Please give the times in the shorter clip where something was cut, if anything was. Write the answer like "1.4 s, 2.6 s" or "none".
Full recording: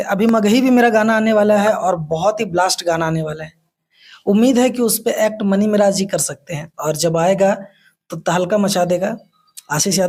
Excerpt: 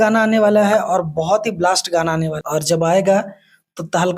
2.4 s

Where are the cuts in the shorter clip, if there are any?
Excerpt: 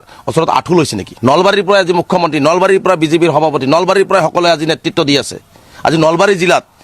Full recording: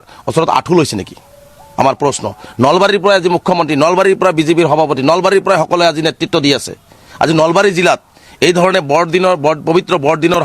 1.0 s

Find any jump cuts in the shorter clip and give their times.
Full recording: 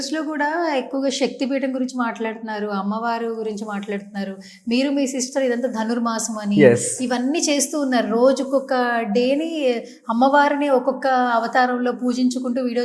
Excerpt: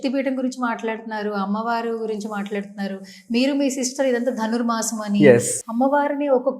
5.6 s

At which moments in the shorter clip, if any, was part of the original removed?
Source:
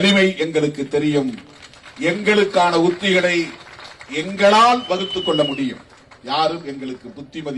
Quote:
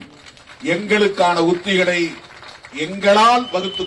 none

